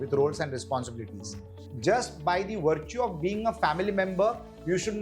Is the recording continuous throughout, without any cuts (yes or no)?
no